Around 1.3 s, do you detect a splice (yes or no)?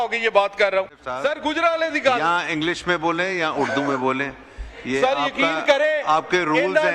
yes